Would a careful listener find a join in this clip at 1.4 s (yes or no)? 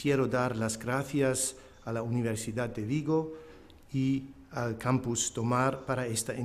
yes